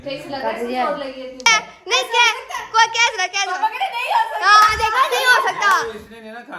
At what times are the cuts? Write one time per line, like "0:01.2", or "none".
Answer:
0:01.5